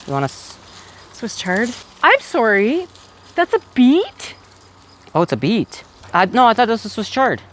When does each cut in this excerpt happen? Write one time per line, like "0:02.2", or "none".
0:01.8
0:06.1